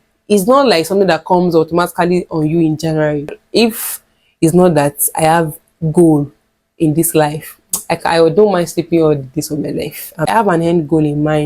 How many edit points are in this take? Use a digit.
2